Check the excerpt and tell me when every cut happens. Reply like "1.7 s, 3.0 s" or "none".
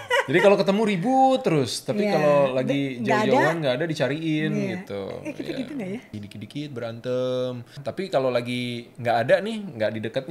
6.1 s, 7.8 s